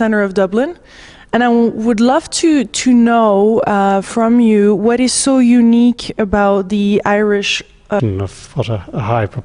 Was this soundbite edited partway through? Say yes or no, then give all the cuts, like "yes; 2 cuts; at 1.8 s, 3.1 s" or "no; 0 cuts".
no; 0 cuts